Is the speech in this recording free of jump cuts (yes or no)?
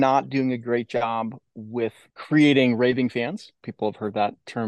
no